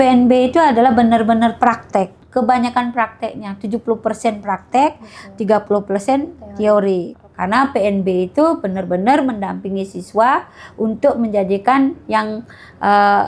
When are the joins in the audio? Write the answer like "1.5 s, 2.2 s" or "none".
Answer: 2.2 s, 7.1 s